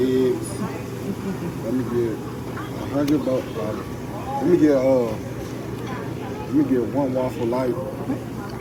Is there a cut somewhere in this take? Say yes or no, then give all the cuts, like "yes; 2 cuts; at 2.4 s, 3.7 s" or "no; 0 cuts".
no; 0 cuts